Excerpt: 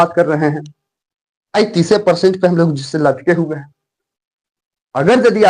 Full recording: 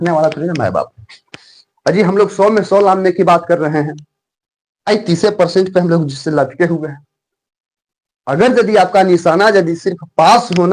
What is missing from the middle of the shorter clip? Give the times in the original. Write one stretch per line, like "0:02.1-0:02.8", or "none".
none